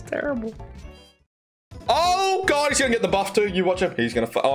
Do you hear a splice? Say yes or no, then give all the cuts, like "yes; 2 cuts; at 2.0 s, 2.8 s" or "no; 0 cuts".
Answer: no; 0 cuts